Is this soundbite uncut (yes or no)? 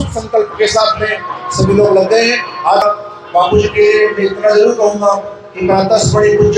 no